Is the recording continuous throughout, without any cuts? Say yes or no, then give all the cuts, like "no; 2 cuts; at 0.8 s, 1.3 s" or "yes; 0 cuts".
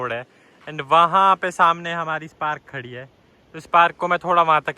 yes; 0 cuts